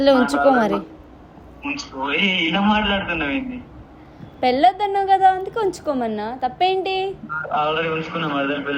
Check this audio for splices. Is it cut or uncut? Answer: uncut